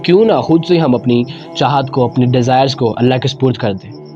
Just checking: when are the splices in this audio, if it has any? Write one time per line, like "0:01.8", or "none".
none